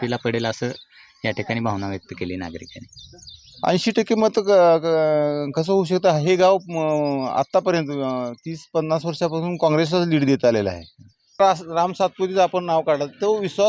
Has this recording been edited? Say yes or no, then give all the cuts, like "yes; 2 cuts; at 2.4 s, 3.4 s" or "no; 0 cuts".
yes; 1 cut; at 11.4 s